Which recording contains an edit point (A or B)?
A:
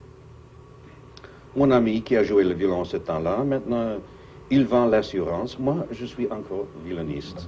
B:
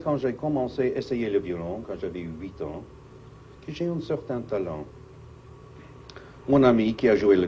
A